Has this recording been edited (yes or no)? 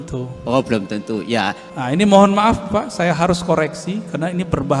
yes